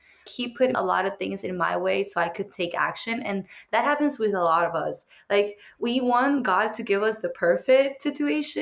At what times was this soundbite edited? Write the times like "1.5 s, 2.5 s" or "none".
none